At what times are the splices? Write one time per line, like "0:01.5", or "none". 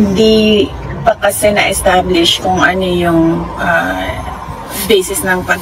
none